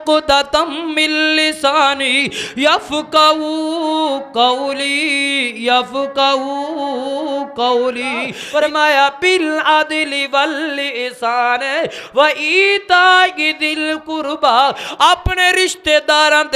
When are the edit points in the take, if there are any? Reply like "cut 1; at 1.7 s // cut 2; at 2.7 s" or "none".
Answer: cut 1; at 8.4 s